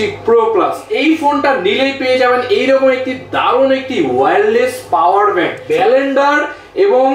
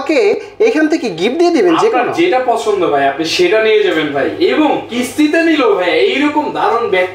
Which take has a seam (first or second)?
first